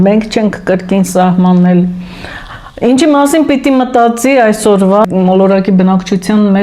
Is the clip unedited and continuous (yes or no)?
no